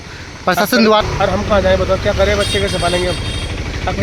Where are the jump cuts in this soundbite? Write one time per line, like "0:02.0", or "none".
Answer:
0:01.0